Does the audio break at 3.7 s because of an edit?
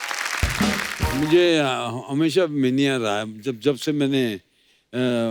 no; 1 cut; at 1.1 s

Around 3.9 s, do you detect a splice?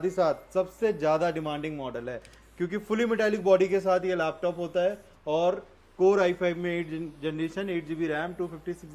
no; 0 cuts

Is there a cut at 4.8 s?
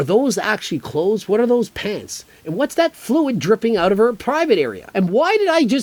no; 0 cuts

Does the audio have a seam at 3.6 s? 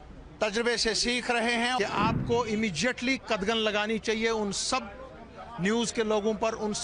no; 1 cut; at 1.8 s

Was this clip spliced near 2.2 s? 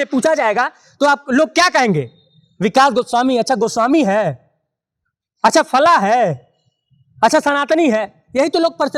no; 0 cuts

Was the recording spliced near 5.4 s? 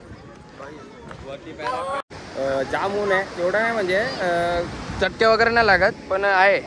no; 1 cut; at 2.0 s

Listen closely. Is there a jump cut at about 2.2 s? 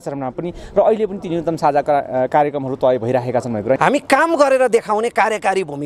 no; 1 cut; at 3.8 s

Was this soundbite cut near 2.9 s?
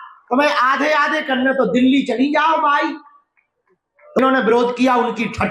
no; 1 cut; at 4.2 s

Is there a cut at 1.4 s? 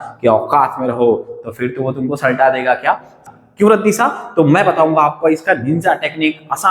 no; 1 cut; at 3.2 s

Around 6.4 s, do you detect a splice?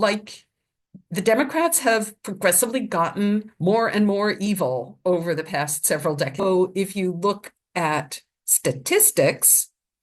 yes; 1 cut; at 6.4 s

